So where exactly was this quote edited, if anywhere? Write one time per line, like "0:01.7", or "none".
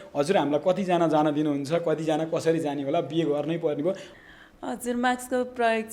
0:04.1